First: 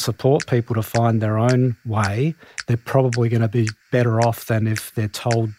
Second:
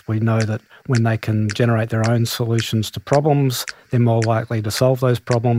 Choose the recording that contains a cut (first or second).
first